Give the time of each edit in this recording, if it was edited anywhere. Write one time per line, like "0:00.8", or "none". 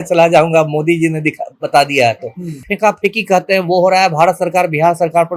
0:02.6